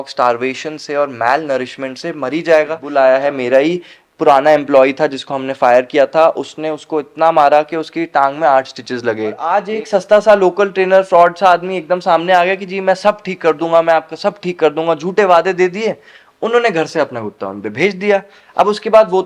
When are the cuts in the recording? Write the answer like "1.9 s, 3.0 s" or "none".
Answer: 2.8 s, 9.4 s